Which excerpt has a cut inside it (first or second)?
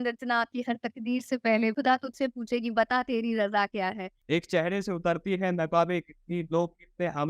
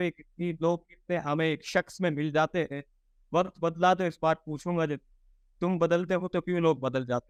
first